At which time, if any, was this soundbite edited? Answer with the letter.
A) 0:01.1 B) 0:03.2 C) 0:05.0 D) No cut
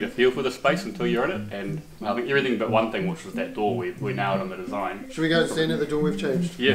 C